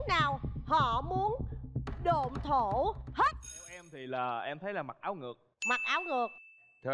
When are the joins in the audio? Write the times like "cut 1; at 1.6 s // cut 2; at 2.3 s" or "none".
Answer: cut 1; at 3.9 s